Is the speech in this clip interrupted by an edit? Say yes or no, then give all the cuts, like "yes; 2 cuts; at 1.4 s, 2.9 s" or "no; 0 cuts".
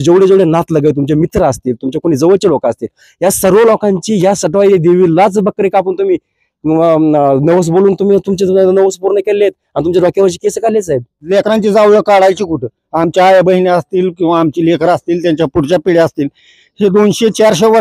yes; 1 cut; at 11.2 s